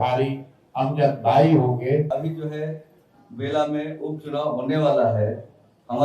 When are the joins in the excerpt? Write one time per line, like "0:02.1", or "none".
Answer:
0:02.1